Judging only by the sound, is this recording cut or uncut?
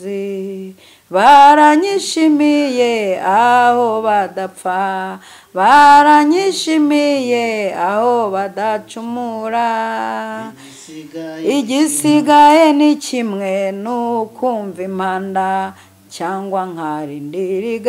uncut